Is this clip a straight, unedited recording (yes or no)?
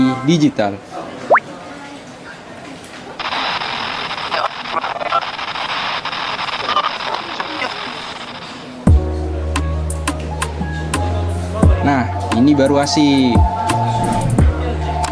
yes